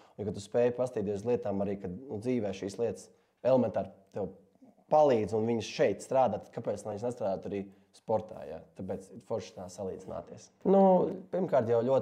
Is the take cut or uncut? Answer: cut